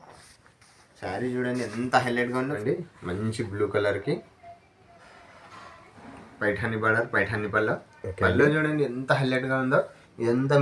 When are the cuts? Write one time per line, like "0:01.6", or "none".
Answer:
0:02.6

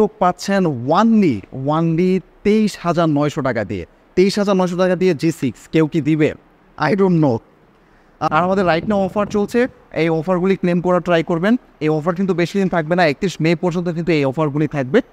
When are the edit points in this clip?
0:08.2

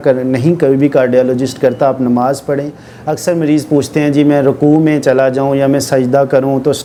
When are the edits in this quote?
none

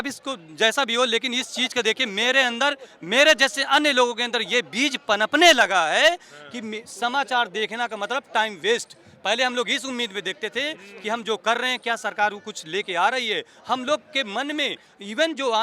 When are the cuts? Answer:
none

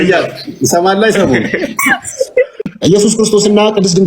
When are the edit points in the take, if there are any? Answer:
0:02.5

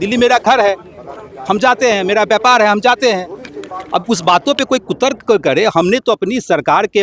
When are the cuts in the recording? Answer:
none

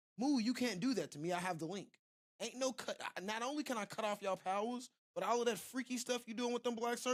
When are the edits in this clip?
none

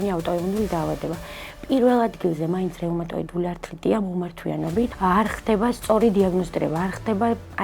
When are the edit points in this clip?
0:04.9

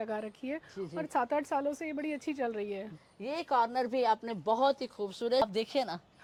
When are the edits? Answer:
none

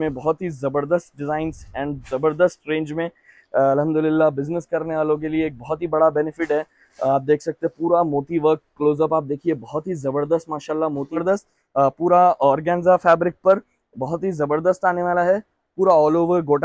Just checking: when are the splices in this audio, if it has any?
0:11.2

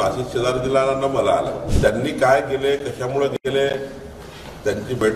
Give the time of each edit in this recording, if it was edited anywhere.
0:01.7

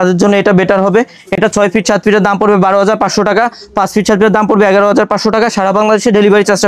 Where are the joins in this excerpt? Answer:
none

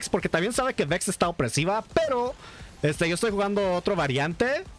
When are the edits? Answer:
none

